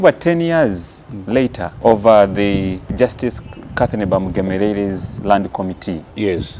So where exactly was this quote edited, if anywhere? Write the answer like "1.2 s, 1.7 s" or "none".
1.7 s, 2.8 s